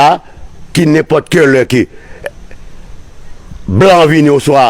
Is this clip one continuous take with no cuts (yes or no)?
yes